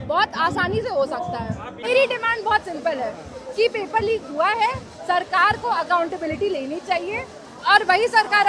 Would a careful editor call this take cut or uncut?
cut